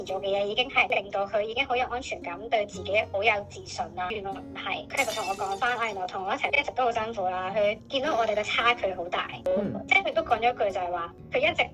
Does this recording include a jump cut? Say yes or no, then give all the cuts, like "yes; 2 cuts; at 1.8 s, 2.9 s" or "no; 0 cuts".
yes; 1 cut; at 9.6 s